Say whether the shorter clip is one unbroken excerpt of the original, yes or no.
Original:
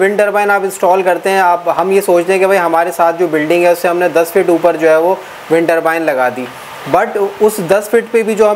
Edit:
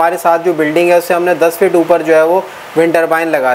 yes